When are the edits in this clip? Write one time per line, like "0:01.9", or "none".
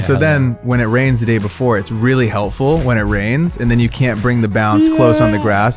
none

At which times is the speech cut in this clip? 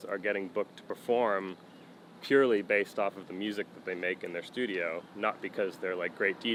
none

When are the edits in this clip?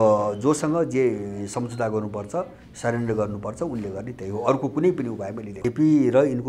0:05.5

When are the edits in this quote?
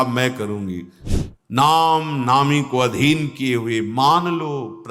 0:00.9

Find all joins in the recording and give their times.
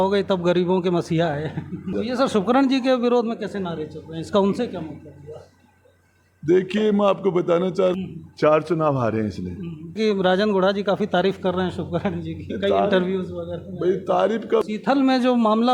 0:02.0
0:07.9
0:10.0
0:14.6

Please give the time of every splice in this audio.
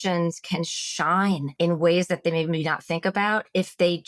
0:01.5

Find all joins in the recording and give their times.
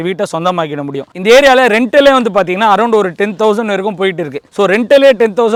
none

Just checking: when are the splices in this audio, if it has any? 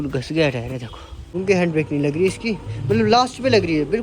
0:01.3

